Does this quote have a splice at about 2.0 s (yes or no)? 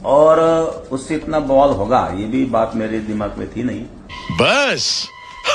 no